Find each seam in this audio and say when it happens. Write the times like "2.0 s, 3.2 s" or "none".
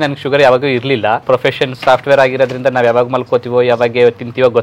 1.2 s